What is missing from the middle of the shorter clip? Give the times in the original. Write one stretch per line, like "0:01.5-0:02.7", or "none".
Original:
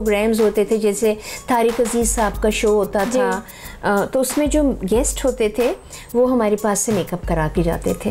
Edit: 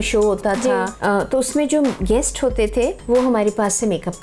0:03.4-0:03.7
0:05.8-0:06.0